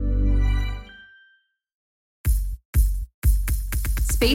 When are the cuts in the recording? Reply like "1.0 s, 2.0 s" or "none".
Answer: 2.0 s